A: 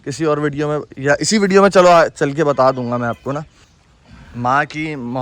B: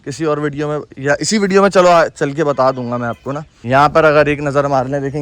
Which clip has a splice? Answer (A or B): A